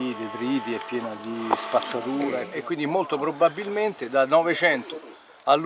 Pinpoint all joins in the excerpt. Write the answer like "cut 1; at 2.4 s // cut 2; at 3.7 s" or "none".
cut 1; at 2.5 s

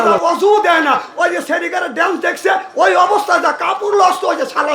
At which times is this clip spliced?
none

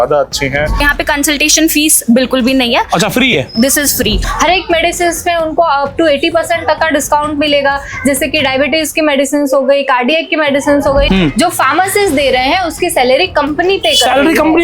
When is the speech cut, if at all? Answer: cut 1; at 0.8 s // cut 2; at 4.2 s // cut 3; at 11.1 s

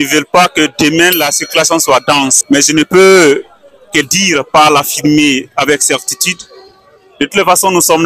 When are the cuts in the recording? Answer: cut 1; at 2.4 s

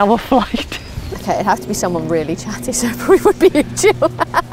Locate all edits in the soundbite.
cut 1; at 1.1 s

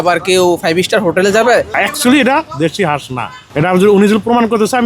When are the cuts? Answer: cut 1; at 1.8 s

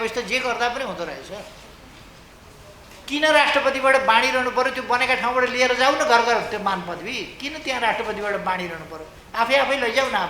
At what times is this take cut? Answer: cut 1; at 2.3 s

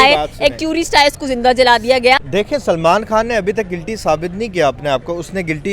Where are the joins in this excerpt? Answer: cut 1; at 2.2 s

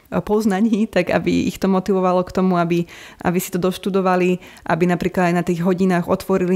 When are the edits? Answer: none

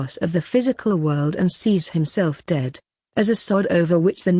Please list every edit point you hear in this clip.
cut 1; at 2.8 s

